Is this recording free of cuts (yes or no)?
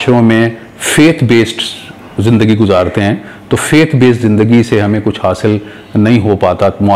yes